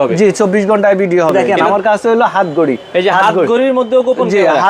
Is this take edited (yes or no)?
yes